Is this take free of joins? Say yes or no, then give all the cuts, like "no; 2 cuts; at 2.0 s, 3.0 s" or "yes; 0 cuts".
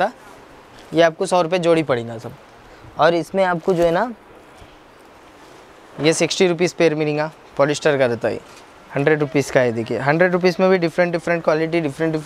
yes; 0 cuts